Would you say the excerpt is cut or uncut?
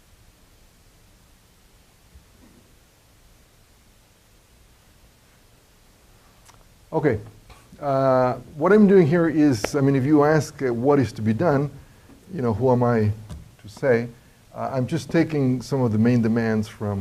uncut